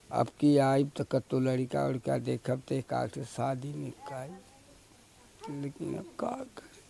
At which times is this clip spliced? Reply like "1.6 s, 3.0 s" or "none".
none